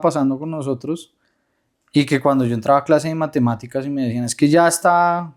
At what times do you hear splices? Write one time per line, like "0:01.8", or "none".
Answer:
none